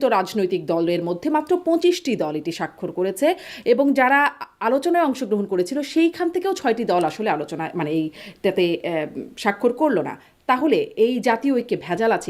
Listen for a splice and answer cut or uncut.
uncut